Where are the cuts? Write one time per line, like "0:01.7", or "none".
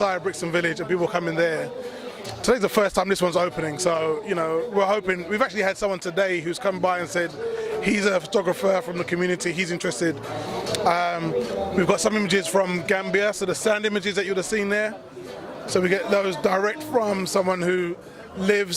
0:09.6